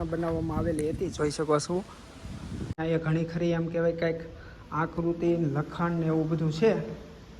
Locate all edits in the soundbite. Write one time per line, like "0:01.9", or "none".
0:02.8